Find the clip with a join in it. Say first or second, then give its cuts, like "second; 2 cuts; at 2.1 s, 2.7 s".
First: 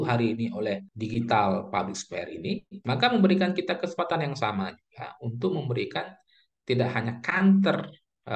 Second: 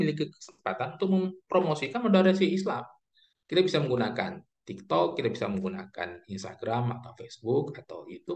first; 2 cuts; at 0.9 s, 2.7 s